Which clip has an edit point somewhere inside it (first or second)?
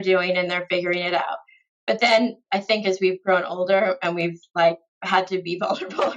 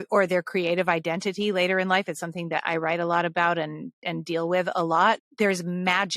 second